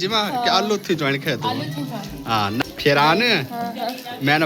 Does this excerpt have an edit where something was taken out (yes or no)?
yes